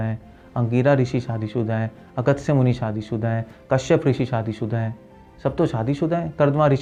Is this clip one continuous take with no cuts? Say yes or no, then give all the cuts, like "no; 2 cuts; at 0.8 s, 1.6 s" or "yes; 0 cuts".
yes; 0 cuts